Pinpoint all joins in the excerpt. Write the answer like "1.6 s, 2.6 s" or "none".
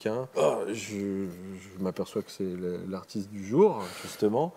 none